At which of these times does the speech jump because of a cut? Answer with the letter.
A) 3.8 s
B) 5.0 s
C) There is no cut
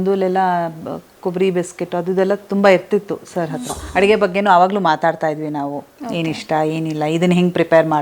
A